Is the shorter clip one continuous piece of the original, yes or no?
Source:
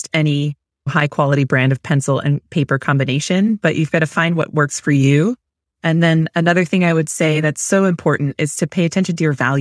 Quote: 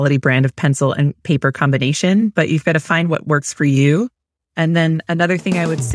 yes